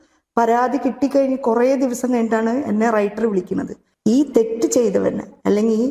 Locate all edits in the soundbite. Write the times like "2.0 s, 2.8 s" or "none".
3.8 s